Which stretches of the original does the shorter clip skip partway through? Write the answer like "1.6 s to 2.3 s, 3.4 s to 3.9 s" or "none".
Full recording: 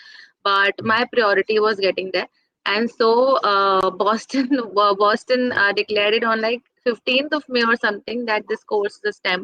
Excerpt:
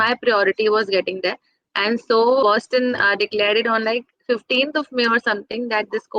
3.3 s to 5.0 s